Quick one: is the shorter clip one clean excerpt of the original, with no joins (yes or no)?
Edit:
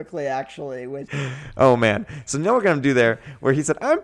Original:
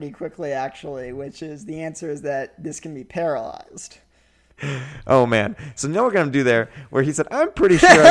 no